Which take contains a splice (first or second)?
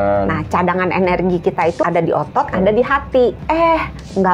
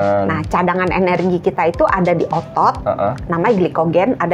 first